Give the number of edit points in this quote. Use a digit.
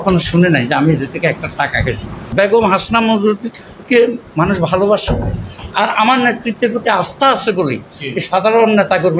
0